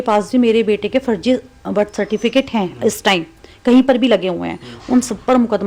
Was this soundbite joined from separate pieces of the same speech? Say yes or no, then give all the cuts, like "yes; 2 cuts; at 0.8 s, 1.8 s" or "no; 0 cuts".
no; 0 cuts